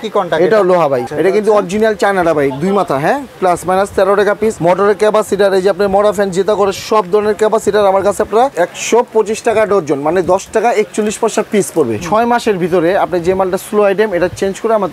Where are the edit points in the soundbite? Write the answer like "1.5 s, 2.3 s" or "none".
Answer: 1.1 s, 4.6 s, 8.5 s, 12.0 s